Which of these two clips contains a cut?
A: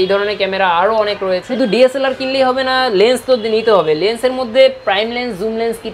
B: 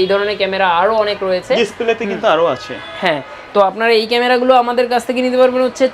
A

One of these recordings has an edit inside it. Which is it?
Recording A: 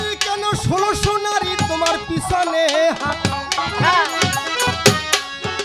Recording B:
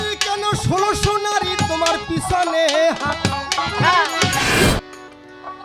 B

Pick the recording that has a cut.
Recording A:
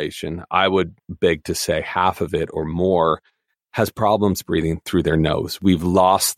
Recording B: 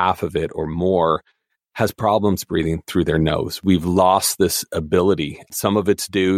A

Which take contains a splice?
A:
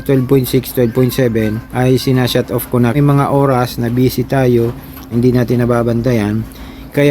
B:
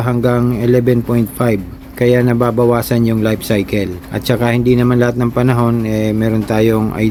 A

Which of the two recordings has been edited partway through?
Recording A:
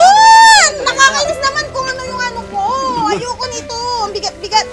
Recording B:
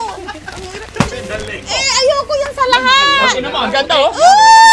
B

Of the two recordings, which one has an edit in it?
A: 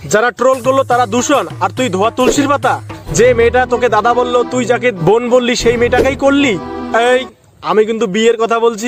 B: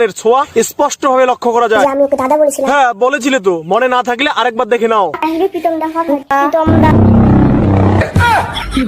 B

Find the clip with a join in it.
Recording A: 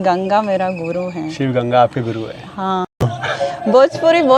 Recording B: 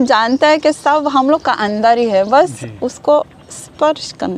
A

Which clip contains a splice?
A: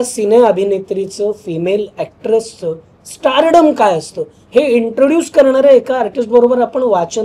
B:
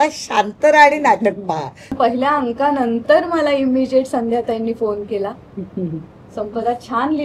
B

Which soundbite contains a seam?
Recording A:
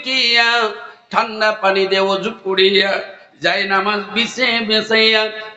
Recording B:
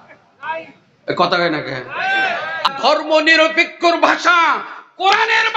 B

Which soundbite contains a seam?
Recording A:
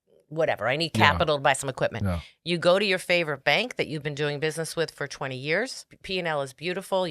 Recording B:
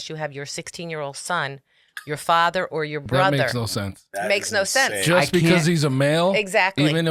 A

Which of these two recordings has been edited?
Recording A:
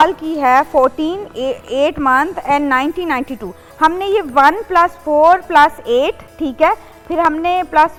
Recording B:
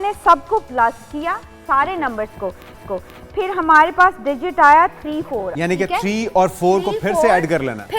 B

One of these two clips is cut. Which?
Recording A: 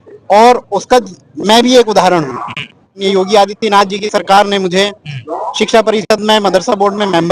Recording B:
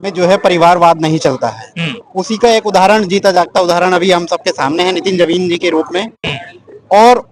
A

